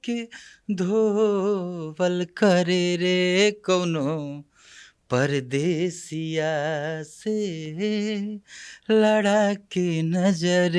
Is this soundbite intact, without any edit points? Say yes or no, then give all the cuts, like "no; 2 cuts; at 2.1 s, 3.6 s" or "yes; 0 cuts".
yes; 0 cuts